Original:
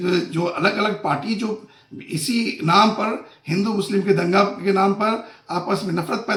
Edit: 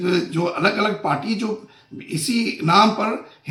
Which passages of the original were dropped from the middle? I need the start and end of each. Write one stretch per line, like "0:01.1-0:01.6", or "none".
none